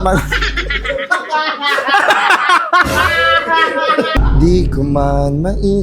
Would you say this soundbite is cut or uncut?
cut